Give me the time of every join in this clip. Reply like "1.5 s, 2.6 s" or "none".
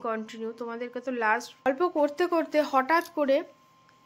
1.7 s